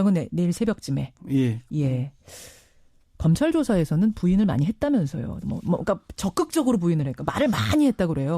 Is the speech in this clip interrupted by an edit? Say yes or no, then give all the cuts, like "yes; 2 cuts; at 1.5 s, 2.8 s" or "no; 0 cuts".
yes; 1 cut; at 7.1 s